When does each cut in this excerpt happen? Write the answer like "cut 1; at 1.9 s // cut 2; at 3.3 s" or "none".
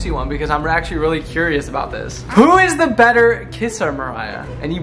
cut 1; at 2.3 s